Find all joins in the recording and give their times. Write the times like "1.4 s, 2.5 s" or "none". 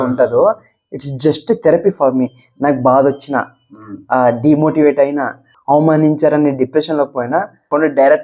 none